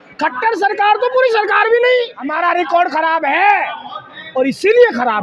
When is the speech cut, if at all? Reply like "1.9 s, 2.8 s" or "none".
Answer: 2.2 s